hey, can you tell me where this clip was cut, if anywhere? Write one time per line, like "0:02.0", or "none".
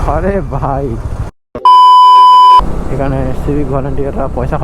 0:01.5
0:02.7